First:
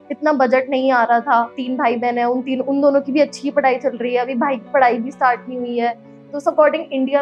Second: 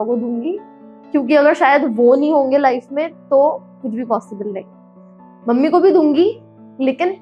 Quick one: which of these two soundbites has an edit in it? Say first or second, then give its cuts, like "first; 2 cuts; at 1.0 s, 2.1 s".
first; 1 cut; at 1.6 s